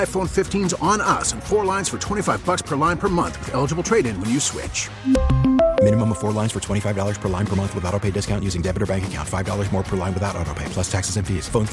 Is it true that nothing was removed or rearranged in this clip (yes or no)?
yes